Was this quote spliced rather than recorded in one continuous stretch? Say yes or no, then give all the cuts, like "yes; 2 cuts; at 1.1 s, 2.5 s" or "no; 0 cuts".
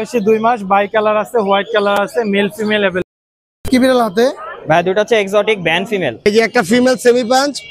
yes; 2 cuts; at 3.0 s, 6.3 s